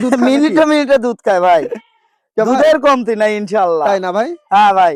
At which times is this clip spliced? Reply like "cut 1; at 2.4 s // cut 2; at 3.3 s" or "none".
none